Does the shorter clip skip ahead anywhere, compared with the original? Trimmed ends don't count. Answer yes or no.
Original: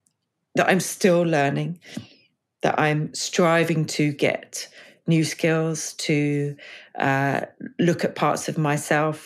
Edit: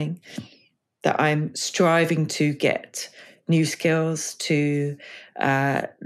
no